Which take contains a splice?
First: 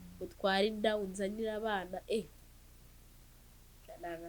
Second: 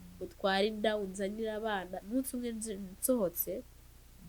second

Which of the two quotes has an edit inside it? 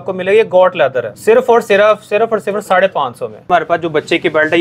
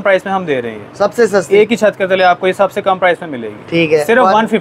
first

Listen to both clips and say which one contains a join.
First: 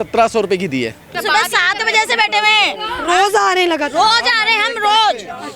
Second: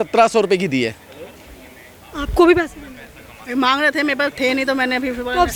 first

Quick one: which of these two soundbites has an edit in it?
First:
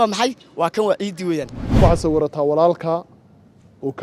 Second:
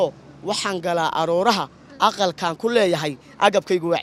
first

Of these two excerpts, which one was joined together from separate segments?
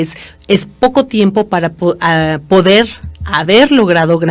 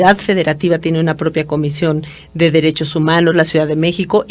second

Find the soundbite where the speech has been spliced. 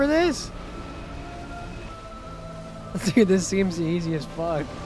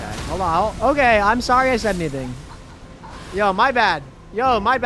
first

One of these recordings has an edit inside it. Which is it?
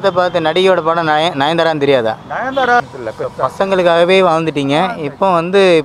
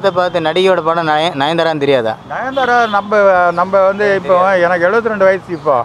first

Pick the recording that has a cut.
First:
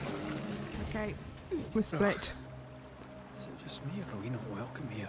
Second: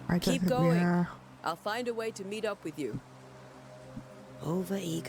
first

